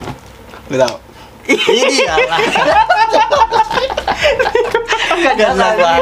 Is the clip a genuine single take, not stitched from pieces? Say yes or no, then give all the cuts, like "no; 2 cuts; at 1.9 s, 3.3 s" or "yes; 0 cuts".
yes; 0 cuts